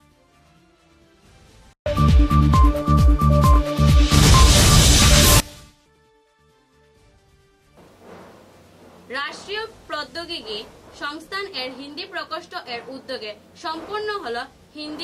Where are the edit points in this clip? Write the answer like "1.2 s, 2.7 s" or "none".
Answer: none

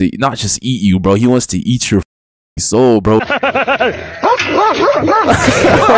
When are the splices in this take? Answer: 3.2 s

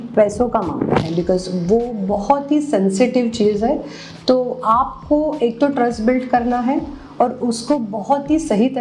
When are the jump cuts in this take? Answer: none

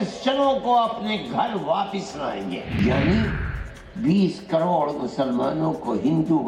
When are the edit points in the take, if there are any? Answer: 2.7 s

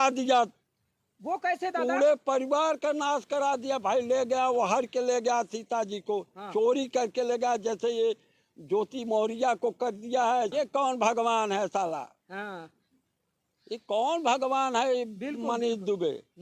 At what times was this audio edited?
10.5 s

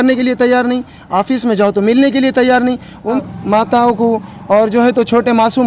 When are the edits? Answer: 3.2 s

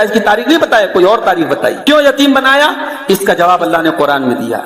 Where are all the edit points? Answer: 1.8 s

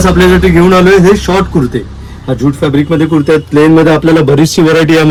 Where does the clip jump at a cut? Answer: none

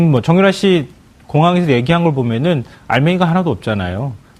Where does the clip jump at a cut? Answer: 2.9 s

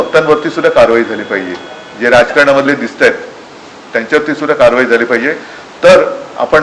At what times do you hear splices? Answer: none

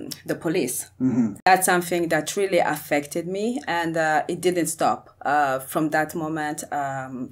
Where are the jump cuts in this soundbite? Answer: 1.5 s

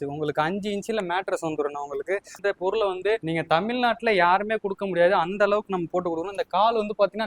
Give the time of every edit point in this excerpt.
2.3 s

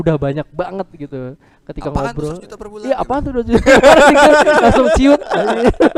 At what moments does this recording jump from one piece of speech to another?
none

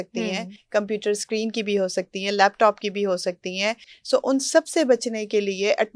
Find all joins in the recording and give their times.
3.9 s

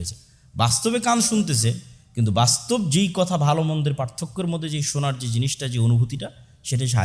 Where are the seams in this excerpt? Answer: none

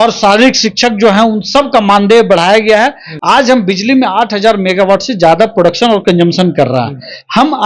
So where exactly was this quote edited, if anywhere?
3.1 s

